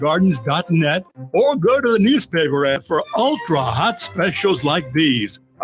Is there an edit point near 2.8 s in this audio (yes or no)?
yes